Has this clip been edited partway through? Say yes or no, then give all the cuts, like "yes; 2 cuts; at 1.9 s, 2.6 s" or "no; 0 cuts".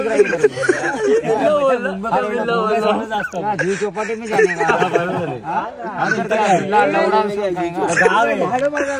no; 0 cuts